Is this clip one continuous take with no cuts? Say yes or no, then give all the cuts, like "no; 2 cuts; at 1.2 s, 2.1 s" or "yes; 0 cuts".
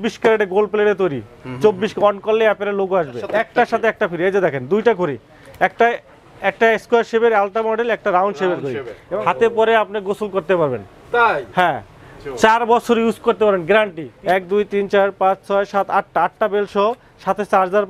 no; 3 cuts; at 3.2 s, 8.9 s, 14.1 s